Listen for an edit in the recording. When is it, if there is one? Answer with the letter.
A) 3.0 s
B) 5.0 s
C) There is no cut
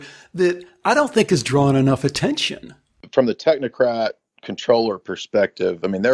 A